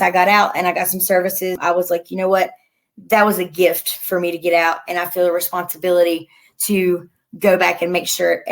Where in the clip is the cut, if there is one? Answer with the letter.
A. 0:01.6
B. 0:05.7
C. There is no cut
A